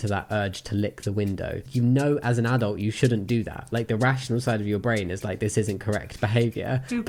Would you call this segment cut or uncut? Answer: uncut